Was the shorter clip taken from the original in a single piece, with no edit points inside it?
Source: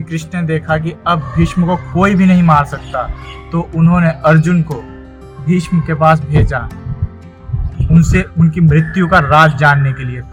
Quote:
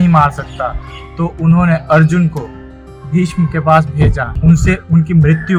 no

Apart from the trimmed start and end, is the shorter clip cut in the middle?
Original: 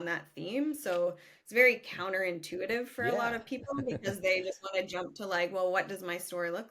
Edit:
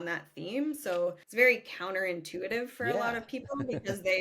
yes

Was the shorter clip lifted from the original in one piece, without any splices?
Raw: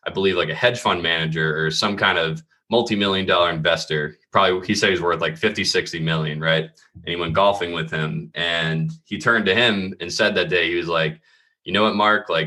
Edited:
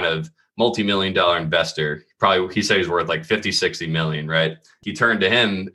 no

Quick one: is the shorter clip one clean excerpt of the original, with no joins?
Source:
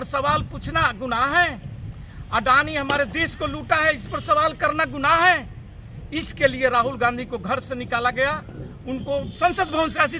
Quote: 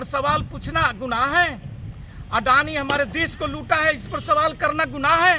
yes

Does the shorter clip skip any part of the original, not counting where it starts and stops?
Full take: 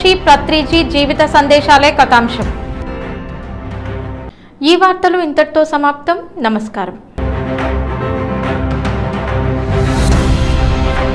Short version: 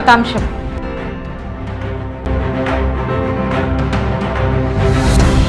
yes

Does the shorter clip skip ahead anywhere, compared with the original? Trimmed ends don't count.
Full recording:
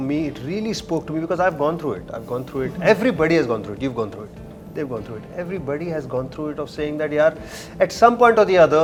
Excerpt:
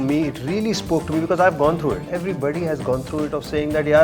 yes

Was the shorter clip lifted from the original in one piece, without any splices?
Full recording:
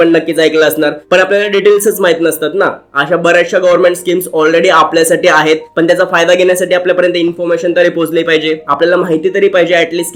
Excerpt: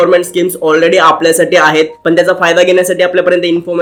yes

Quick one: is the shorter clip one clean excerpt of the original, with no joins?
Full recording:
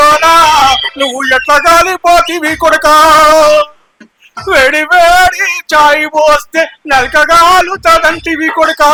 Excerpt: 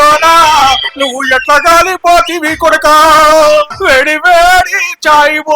no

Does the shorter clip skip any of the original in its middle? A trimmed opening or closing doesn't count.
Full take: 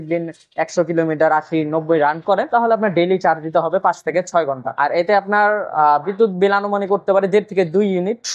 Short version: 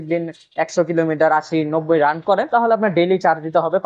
no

